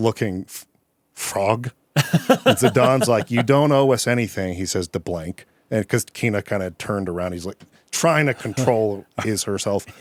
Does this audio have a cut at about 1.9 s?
no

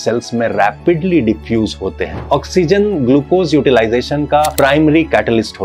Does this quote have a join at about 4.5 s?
yes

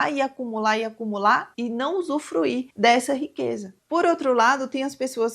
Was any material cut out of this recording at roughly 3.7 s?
yes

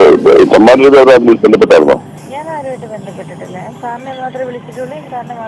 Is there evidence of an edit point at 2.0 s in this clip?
no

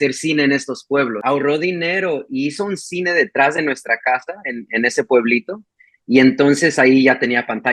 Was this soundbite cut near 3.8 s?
no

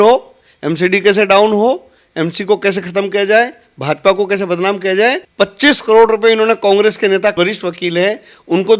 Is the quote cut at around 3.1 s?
no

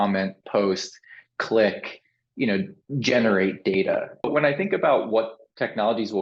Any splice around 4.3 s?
yes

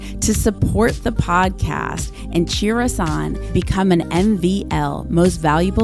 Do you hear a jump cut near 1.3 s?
no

